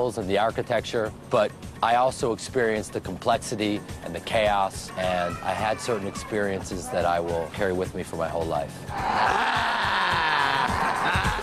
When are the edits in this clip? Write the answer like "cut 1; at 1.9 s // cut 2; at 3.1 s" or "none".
cut 1; at 4.8 s